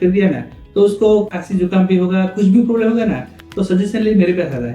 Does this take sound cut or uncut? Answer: cut